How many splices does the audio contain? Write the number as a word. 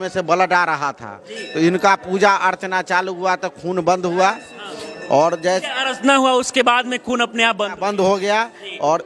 zero